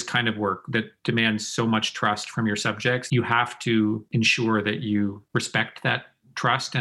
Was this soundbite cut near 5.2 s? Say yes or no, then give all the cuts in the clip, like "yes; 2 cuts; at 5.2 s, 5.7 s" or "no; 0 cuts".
yes; 3 cuts; at 3.0 s, 4.0 s, 5.2 s